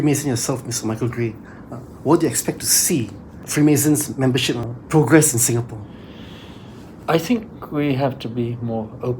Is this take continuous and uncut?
no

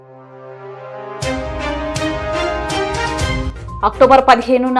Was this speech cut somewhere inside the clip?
no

